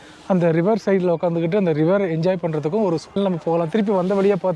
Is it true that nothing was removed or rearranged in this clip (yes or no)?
no